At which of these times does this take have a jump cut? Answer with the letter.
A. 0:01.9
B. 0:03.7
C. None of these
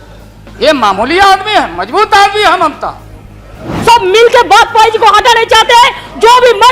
B